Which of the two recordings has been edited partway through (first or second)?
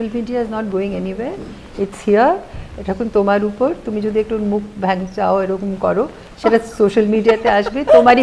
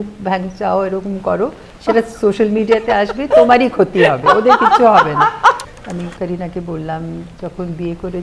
second